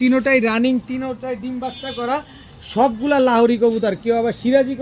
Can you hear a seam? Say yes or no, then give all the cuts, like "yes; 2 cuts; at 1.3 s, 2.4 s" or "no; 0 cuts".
no; 0 cuts